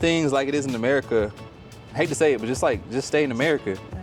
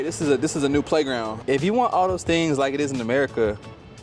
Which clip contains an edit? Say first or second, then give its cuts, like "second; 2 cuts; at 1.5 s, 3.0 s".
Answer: second; 1 cut; at 1.3 s